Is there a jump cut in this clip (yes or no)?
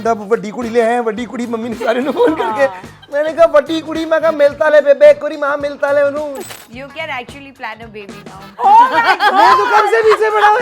yes